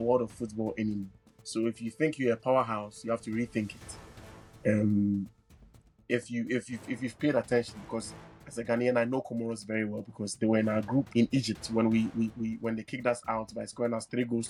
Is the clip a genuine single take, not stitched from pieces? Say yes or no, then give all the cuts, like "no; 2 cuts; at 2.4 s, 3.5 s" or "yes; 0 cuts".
yes; 0 cuts